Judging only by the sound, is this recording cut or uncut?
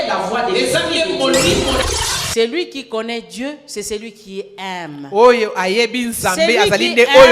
cut